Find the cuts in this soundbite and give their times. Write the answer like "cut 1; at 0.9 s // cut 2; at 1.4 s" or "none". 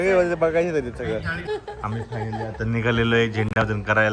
cut 1; at 1.4 s